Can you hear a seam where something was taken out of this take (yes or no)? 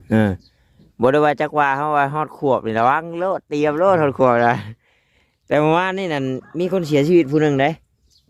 no